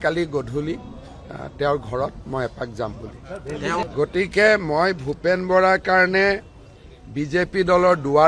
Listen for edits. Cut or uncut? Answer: cut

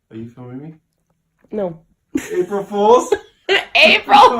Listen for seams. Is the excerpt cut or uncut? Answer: cut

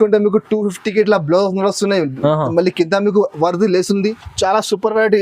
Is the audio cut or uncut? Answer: cut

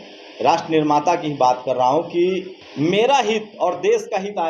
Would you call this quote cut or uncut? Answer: cut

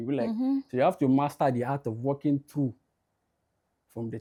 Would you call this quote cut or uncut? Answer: uncut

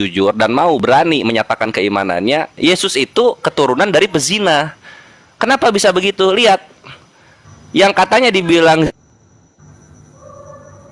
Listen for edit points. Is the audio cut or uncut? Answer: uncut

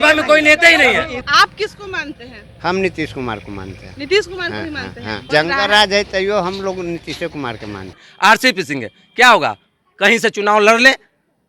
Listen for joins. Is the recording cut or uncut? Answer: cut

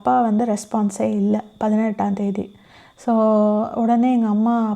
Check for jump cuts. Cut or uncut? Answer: uncut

